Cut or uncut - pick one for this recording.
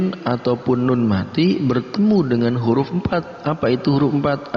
uncut